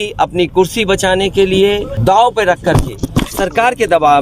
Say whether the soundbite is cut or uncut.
cut